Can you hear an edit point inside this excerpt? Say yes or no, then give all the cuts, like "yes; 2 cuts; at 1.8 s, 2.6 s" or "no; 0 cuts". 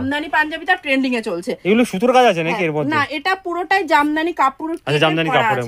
no; 0 cuts